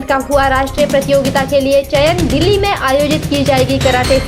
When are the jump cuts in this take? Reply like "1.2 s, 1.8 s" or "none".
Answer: none